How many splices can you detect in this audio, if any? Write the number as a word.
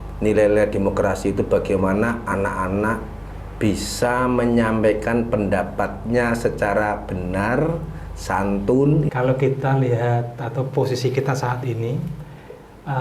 one